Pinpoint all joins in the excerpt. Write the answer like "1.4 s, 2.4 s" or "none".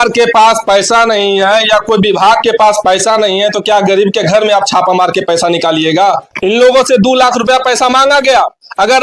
6.3 s